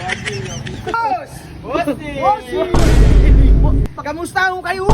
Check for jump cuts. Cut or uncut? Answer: cut